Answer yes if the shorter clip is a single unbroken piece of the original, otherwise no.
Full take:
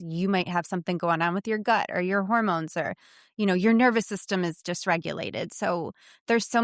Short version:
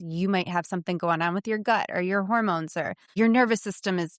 no